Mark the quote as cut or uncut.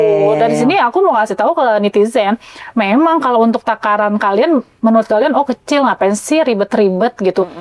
uncut